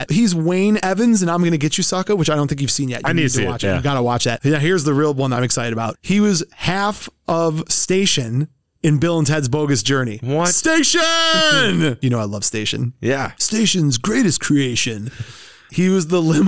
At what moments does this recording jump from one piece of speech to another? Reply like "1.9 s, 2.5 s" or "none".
none